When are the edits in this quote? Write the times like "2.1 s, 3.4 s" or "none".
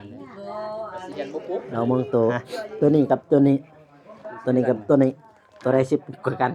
1.7 s